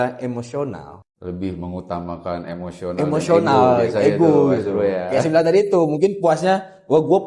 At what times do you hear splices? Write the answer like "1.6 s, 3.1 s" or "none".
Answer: 0.9 s